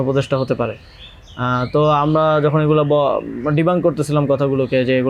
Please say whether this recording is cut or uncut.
uncut